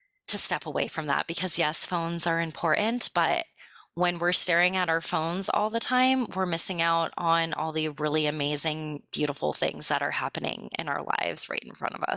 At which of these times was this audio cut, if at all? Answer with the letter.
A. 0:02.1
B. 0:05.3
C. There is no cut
C